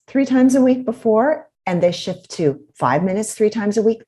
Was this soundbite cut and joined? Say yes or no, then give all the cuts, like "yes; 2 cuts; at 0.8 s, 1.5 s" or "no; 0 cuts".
yes; 1 cut; at 1.5 s